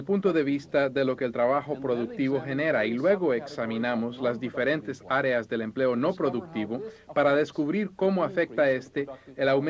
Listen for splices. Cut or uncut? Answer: cut